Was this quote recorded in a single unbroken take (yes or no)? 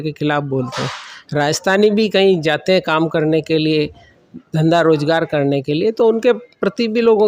yes